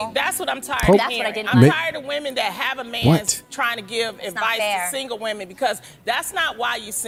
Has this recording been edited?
no; 0 cuts

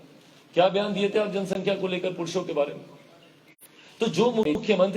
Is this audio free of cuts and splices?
yes; 0 cuts

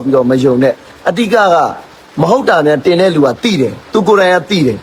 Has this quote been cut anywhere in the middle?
no; 0 cuts

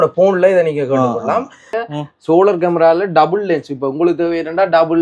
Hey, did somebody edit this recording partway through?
yes; 1 cut; at 1.8 s

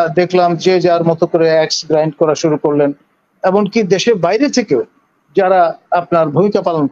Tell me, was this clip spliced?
no; 0 cuts

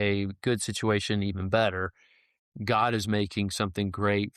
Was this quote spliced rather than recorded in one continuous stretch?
no; 0 cuts

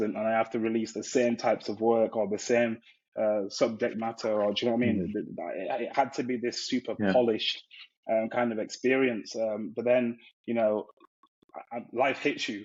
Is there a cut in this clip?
no; 0 cuts

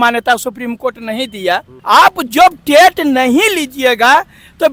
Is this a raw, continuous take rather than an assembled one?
yes; 0 cuts

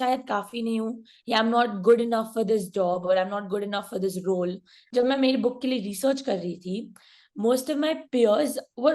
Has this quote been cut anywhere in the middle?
yes; 1 cut; at 4.7 s

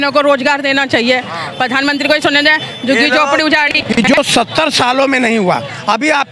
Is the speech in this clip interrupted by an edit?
yes; 1 cut; at 4.2 s

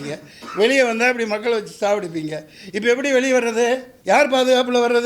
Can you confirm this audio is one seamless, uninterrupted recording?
no; 1 cut; at 3.9 s

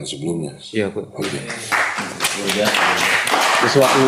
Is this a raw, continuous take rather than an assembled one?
yes; 0 cuts

